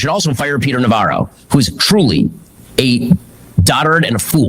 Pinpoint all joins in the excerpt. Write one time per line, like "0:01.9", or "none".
none